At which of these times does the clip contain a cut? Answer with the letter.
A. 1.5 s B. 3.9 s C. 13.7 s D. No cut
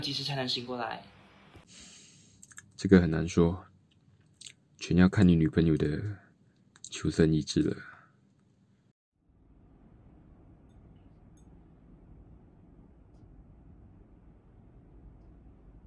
A